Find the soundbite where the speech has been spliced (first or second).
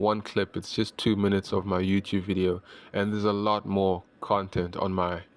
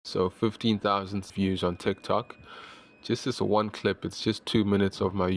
second